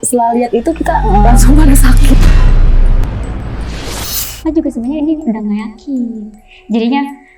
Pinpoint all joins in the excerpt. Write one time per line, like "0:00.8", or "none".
0:04.4